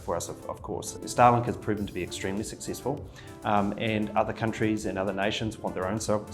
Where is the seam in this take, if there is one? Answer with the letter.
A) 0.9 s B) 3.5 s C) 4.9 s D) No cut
A